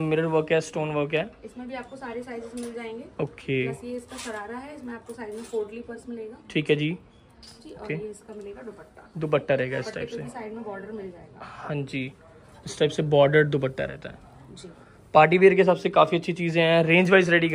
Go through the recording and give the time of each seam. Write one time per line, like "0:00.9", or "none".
none